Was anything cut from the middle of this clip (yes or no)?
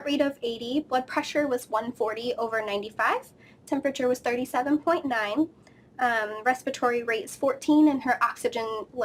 no